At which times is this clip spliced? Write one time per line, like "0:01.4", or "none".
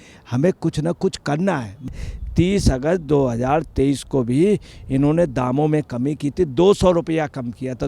0:01.9